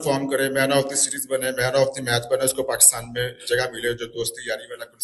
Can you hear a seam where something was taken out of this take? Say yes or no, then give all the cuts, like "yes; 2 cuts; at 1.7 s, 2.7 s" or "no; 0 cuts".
no; 0 cuts